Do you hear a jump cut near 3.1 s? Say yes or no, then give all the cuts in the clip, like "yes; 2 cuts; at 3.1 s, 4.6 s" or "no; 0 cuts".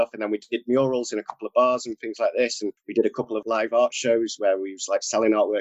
yes; 1 cut; at 3.1 s